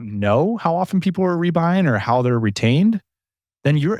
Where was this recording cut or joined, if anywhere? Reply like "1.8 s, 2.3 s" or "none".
none

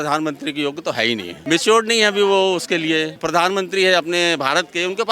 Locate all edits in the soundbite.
1.3 s, 3.2 s

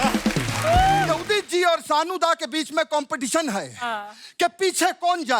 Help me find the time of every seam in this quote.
1.1 s

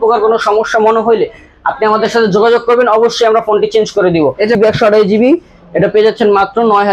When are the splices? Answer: 4.6 s

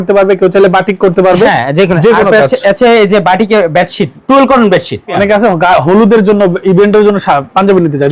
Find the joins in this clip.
4.1 s, 5.1 s

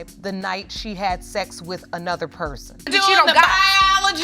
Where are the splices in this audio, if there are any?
2.8 s

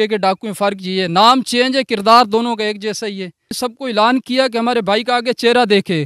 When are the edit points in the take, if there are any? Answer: 3.6 s

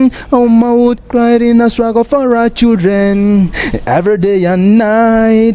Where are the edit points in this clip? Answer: none

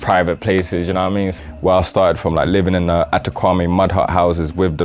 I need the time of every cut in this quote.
1.3 s

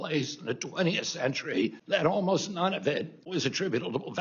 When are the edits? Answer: 1.8 s, 3.2 s

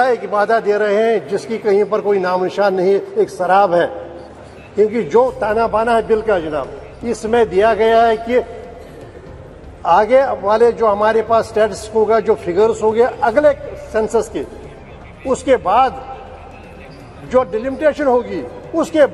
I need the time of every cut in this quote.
none

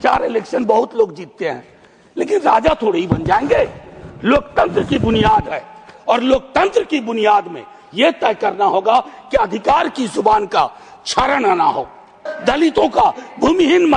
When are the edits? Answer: 12.3 s

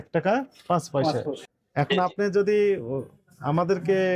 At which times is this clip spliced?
1.5 s

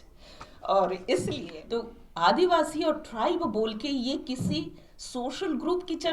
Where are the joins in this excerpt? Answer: 1.5 s

